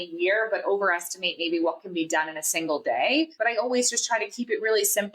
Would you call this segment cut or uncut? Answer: cut